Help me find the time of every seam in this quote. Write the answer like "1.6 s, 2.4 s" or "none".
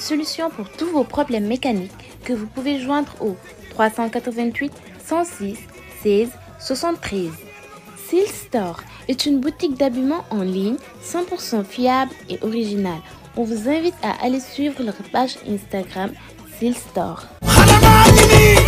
none